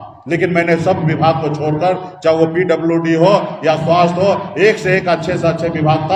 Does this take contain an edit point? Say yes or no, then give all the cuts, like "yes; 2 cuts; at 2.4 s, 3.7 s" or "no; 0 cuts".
no; 0 cuts